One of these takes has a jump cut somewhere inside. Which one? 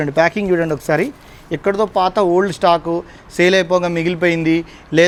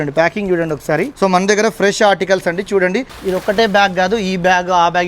second; 2 cuts; at 1.1 s, 3.1 s

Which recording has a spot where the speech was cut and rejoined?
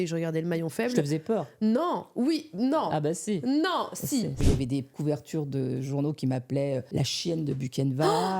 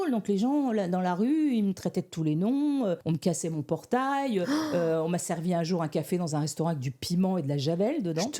first; 2 cuts; at 4.5 s, 6.9 s

